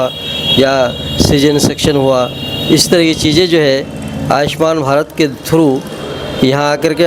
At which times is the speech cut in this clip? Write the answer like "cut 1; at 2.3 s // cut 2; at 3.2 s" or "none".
none

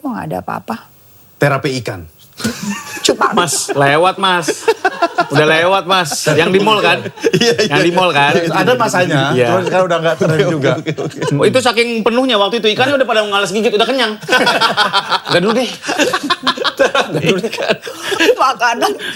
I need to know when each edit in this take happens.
none

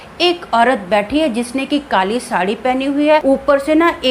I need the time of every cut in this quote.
cut 1; at 3.2 s

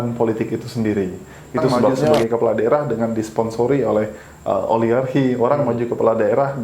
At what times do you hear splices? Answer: cut 1; at 2.2 s

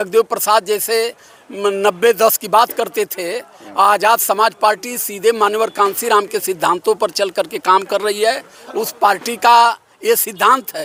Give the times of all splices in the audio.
none

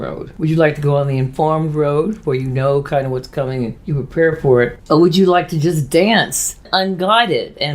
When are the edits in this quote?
cut 1; at 6.5 s

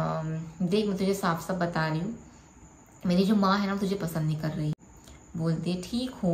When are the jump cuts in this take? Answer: cut 1; at 4.9 s

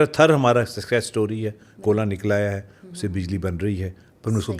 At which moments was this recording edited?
none

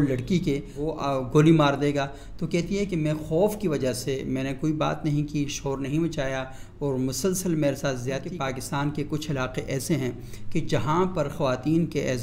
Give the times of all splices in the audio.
cut 1; at 8.3 s

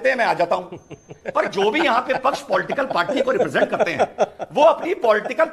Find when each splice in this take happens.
none

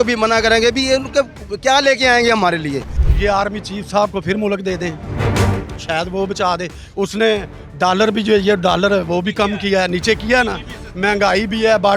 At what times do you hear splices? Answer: cut 1; at 2.9 s

